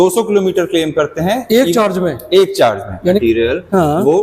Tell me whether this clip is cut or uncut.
cut